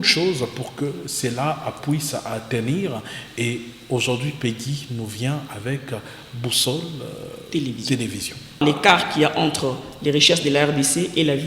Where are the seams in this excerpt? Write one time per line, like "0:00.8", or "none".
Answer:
0:08.6